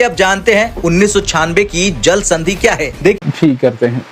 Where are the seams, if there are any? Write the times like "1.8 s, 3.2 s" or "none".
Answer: 3.2 s